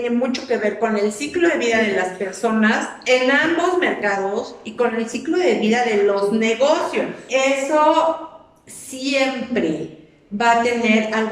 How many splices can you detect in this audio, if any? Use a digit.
1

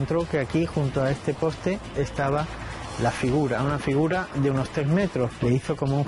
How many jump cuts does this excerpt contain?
0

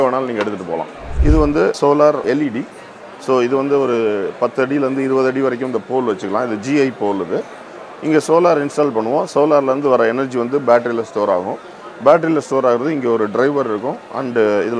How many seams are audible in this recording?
0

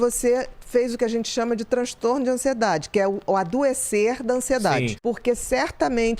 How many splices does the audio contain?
1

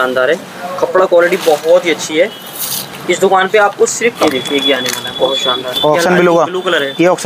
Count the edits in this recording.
1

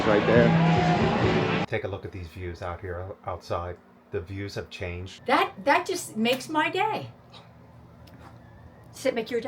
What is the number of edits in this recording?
2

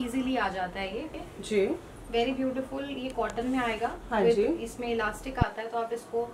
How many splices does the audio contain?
1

